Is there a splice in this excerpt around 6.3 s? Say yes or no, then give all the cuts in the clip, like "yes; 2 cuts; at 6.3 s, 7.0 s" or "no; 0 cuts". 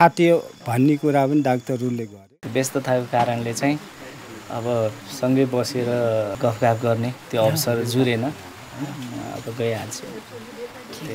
yes; 2 cuts; at 2.2 s, 6.3 s